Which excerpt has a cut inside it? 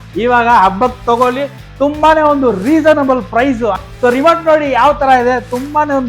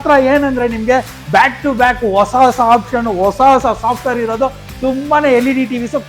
first; 1 cut; at 3.8 s

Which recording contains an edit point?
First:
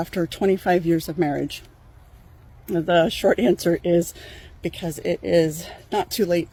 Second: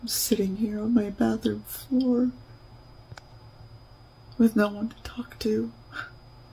second; 1 cut; at 3.1 s

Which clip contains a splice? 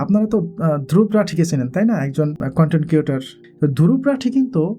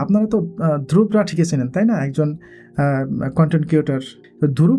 first; 1 cut; at 2.4 s

